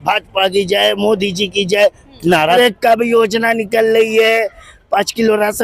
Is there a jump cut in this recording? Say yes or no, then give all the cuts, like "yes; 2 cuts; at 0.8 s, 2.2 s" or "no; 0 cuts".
yes; 1 cut; at 2.6 s